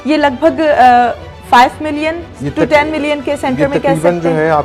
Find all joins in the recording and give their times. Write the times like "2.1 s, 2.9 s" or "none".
none